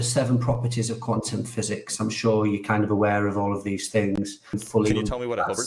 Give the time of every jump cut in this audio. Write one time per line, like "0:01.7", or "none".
0:04.6